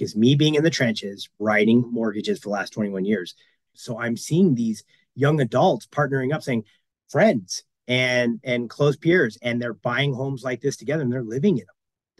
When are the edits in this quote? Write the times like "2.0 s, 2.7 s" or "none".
3.6 s, 6.8 s

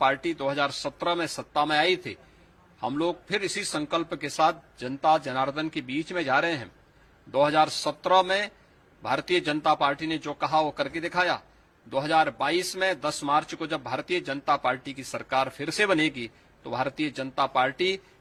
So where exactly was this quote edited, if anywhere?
none

